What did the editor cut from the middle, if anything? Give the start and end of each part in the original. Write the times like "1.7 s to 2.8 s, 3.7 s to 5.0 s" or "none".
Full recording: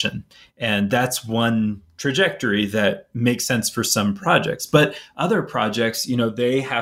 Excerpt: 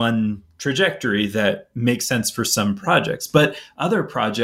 none